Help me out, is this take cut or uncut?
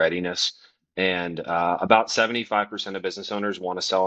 uncut